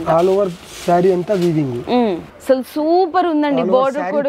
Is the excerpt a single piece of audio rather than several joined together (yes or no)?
no